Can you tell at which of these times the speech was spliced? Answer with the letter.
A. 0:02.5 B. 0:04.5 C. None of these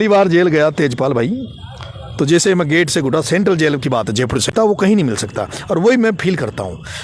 B